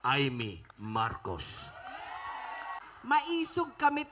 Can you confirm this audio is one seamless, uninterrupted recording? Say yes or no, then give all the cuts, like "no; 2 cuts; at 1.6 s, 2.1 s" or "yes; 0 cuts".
no; 1 cut; at 2.8 s